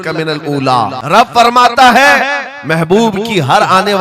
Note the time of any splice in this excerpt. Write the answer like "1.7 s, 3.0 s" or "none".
1.0 s

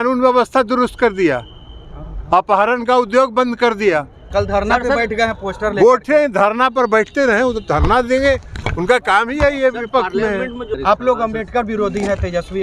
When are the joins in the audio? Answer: 4.2 s, 10.7 s

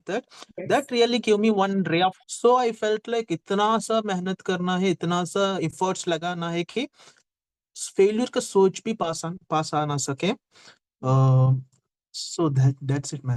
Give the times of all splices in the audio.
2.3 s

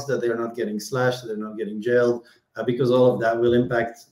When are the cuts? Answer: none

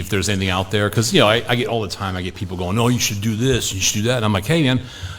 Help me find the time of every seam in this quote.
none

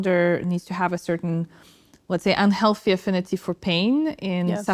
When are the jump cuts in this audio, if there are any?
none

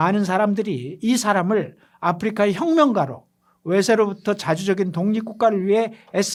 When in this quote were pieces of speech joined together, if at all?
none

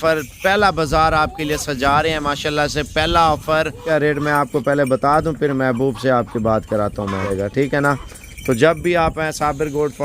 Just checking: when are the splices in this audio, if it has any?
3.8 s, 7.3 s

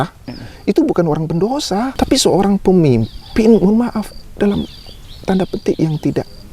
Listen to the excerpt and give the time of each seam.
1.9 s

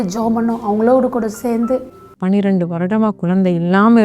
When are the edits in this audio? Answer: 2.1 s

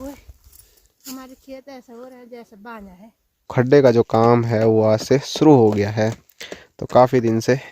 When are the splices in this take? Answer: 3.4 s

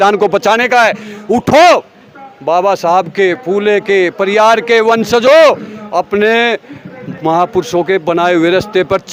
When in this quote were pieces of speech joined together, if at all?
none

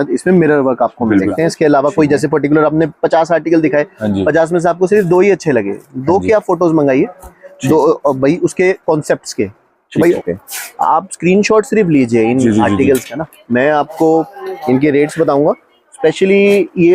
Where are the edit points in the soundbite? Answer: 1.3 s, 10.2 s

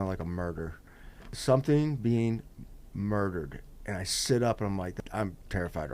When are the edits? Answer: 1.3 s, 5.0 s

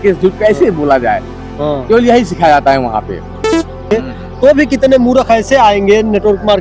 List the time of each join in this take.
3.8 s

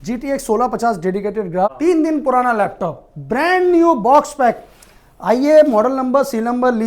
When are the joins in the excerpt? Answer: 1.7 s

